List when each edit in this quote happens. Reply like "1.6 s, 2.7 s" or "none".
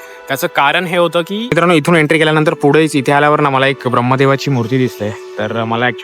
1.4 s